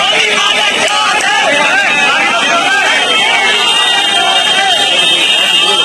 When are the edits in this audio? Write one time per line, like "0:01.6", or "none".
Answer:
none